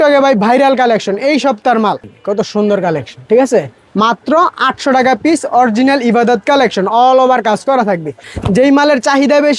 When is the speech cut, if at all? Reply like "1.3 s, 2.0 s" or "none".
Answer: 2.1 s, 8.3 s

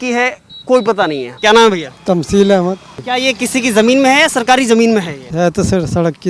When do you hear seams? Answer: 1.3 s, 3.0 s, 5.2 s

